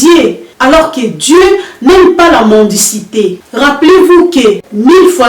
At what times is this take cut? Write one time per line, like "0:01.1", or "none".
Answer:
0:03.4